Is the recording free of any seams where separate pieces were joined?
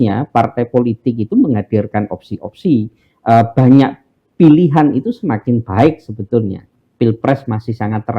no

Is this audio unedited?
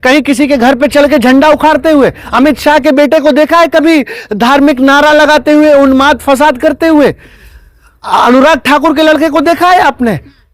yes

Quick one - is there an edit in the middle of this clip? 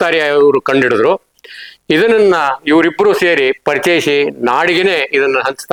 no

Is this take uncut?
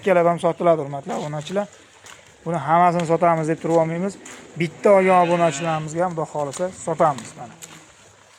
yes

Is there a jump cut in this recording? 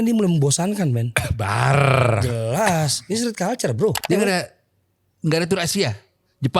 yes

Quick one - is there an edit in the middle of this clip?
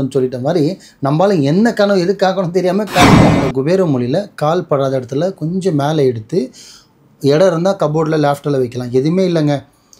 yes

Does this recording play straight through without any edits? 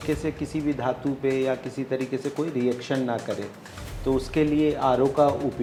yes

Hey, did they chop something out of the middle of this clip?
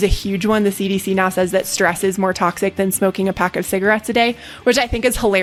no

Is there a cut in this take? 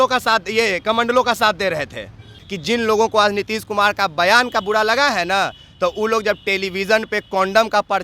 yes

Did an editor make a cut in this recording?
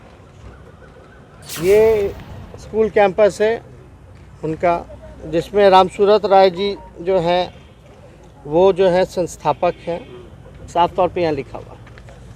yes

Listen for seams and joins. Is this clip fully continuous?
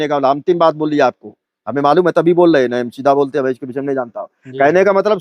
yes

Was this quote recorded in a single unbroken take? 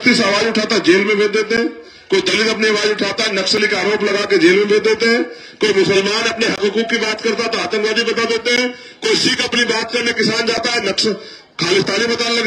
yes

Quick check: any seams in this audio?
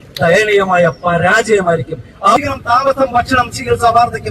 yes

